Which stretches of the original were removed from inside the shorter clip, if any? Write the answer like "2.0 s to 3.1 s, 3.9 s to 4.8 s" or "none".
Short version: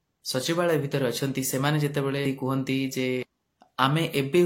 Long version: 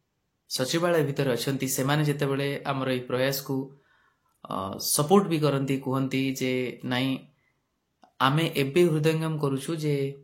2.5 s to 5.7 s, 6.8 s to 7.7 s